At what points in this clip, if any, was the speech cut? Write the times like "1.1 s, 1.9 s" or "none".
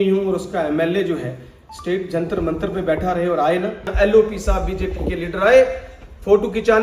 3.9 s